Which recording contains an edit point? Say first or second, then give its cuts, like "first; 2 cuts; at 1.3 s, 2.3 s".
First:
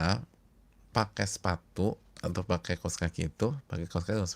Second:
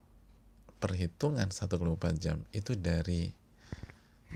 first; 1 cut; at 2.1 s